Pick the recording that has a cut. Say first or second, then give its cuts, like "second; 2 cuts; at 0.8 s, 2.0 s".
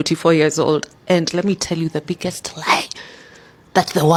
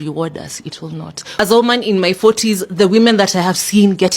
second; 1 cut; at 1.2 s